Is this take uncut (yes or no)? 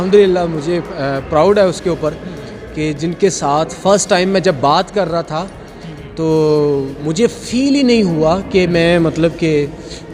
yes